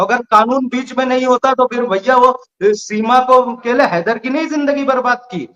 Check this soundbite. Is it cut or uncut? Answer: cut